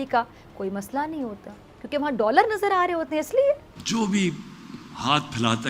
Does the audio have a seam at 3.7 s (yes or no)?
yes